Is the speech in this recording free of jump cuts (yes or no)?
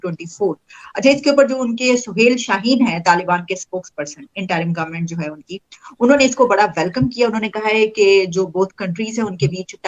yes